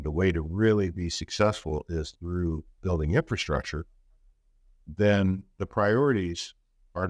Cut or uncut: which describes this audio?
uncut